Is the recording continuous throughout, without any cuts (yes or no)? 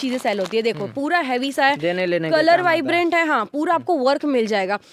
yes